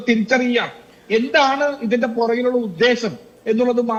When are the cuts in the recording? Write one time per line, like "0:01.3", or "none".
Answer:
none